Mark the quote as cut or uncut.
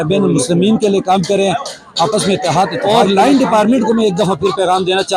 cut